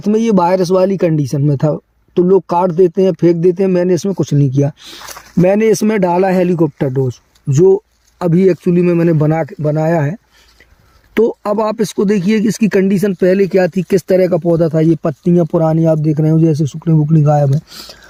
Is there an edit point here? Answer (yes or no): no